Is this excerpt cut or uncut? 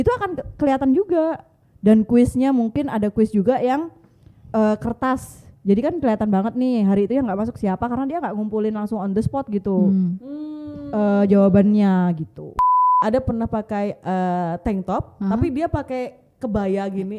cut